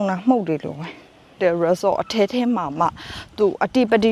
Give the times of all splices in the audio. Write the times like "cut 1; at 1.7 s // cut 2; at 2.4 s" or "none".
cut 1; at 1.4 s